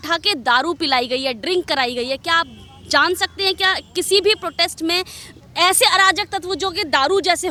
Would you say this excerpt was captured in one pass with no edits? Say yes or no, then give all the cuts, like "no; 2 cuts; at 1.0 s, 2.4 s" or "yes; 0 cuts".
yes; 0 cuts